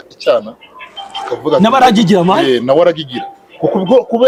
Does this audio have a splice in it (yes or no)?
no